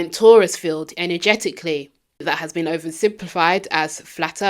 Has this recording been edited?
yes; 1 cut; at 2.2 s

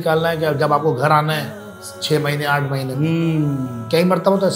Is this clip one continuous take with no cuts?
yes; 0 cuts

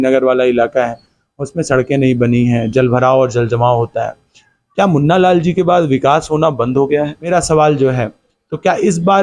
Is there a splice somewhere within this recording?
yes; 1 cut; at 7.3 s

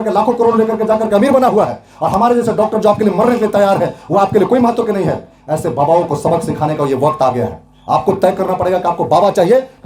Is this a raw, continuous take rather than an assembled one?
yes; 0 cuts

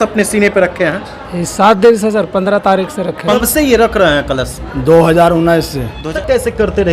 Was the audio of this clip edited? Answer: yes; 2 cuts; at 3.4 s, 6.1 s

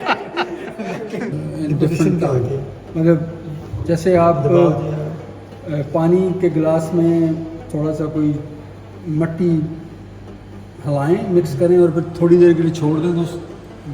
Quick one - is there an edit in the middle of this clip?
yes; 1 cut; at 1.3 s

